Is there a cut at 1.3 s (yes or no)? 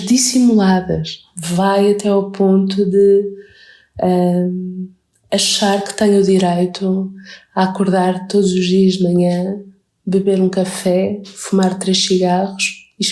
yes